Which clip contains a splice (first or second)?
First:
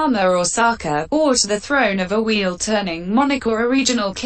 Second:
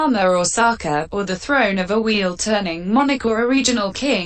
second